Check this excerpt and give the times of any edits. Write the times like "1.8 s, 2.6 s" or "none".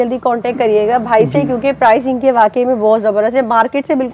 none

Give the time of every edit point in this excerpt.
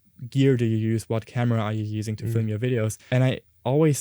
3.0 s

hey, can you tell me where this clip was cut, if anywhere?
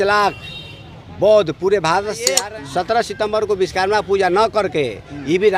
2.4 s

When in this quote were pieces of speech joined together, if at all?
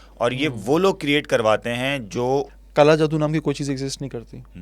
2.5 s

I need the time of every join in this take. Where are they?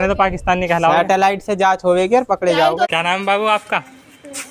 2.9 s

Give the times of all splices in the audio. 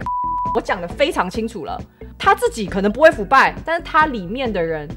2.1 s

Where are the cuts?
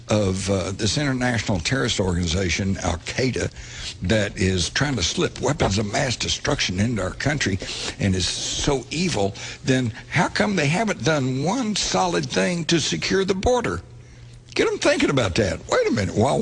6.4 s

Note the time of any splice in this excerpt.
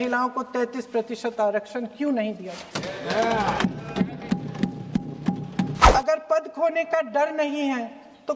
5.8 s

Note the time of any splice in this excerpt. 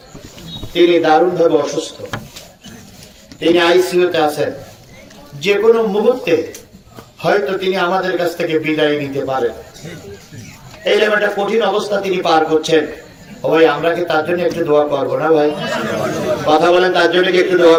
none

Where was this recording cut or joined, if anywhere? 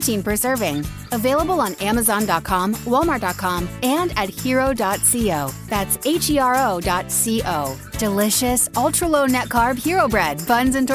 none

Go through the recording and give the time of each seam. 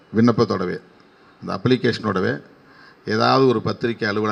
none

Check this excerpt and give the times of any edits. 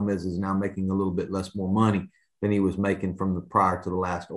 none

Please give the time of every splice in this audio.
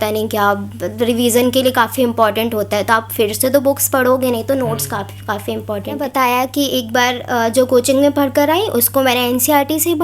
6.1 s

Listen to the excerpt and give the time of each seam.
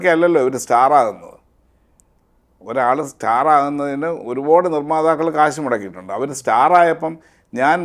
none

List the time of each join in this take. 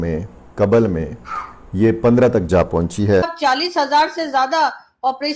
3.2 s

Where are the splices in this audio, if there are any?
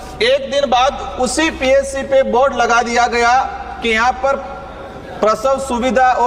none

